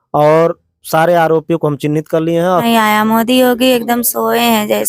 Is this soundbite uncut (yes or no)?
no